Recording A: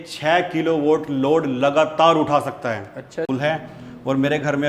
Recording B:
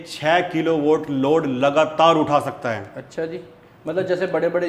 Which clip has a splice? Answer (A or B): A